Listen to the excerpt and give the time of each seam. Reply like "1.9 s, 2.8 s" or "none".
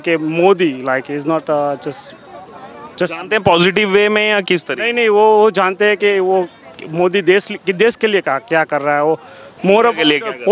none